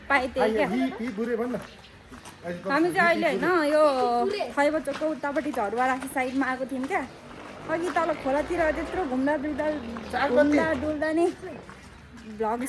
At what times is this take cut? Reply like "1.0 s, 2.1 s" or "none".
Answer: none